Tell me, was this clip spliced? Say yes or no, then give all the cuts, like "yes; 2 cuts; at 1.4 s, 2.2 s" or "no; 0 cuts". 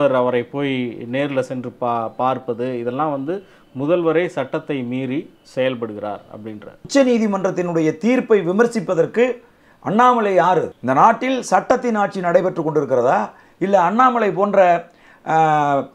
yes; 2 cuts; at 6.9 s, 10.7 s